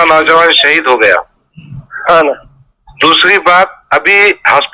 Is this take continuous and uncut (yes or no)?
yes